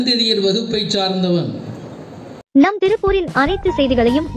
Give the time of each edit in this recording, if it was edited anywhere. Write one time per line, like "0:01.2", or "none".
0:02.3